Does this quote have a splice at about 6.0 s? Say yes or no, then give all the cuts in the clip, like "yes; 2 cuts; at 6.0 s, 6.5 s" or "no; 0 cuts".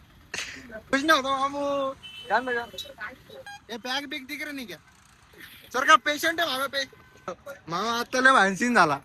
no; 3 cuts; at 0.9 s, 3.5 s, 7.4 s